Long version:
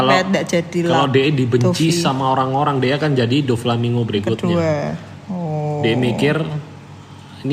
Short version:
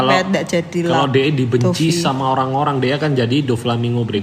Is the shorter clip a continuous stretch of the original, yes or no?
yes